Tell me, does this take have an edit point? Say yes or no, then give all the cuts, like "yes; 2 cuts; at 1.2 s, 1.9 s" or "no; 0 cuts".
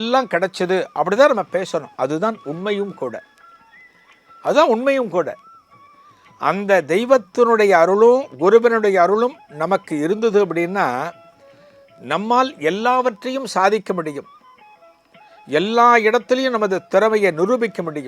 no; 0 cuts